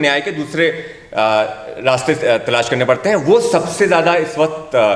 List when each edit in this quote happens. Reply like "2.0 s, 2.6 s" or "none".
none